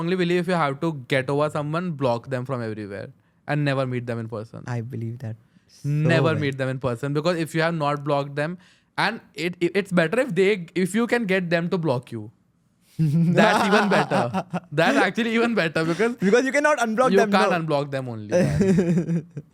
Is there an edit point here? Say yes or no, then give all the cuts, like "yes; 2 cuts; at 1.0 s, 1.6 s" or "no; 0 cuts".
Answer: no; 0 cuts